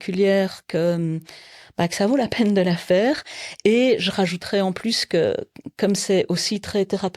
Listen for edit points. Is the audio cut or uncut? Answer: uncut